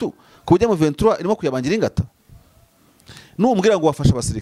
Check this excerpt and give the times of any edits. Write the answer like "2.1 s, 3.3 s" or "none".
none